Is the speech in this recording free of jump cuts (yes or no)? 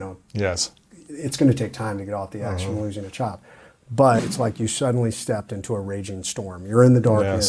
no